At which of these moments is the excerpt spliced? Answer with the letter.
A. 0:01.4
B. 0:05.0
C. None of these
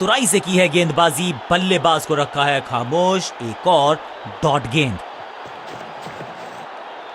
B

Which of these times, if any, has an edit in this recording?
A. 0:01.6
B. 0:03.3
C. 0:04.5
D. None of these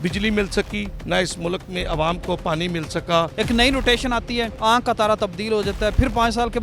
B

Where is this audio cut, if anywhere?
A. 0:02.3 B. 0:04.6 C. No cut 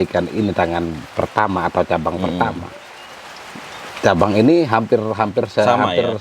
C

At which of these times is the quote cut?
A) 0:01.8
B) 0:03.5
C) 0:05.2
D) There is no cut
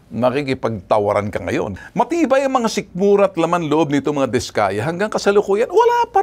A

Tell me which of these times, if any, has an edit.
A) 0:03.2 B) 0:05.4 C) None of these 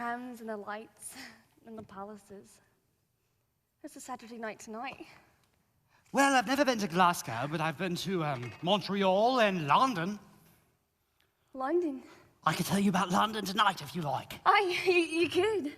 C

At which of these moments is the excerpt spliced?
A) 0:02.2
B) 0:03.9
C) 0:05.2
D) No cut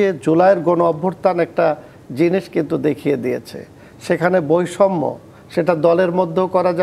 D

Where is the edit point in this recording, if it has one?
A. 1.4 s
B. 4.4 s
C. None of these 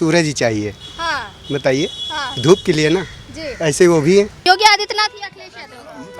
B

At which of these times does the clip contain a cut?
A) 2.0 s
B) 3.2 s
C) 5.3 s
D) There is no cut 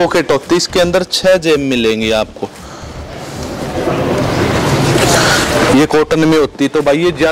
D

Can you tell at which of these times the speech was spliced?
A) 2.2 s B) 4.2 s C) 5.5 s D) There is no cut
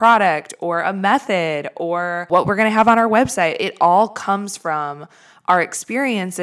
A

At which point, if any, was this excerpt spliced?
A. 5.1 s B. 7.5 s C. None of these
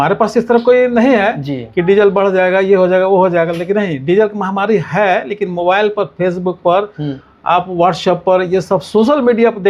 C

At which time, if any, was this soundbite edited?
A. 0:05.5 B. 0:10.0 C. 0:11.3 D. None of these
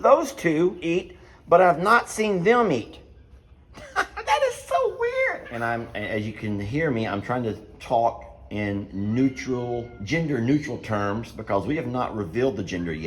A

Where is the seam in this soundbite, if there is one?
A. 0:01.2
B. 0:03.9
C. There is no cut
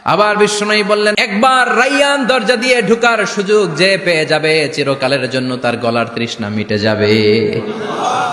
A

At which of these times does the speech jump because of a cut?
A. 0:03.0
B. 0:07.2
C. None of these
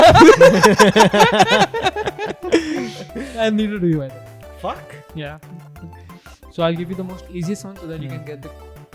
C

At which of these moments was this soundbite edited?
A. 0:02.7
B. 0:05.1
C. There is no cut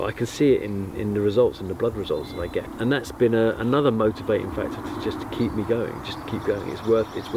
A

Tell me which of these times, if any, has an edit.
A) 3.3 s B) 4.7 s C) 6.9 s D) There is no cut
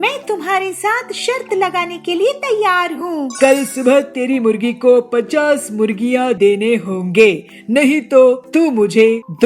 A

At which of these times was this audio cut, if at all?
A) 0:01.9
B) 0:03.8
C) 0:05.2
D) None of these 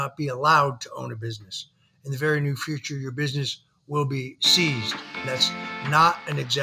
C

